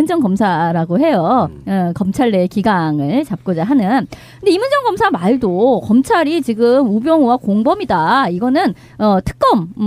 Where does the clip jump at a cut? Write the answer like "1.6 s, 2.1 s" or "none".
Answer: 6.5 s